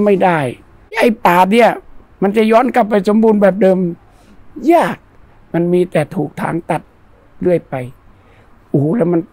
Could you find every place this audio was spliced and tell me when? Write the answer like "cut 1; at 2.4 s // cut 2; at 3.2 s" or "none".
cut 1; at 1.0 s